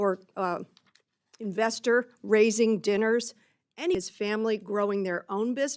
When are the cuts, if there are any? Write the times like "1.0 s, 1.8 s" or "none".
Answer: 3.9 s